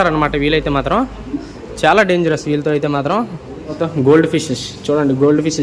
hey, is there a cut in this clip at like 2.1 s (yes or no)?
no